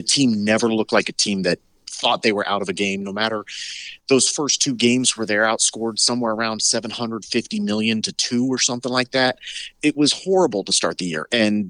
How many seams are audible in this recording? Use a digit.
1